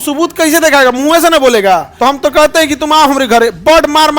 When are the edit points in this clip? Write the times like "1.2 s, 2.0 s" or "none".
1.9 s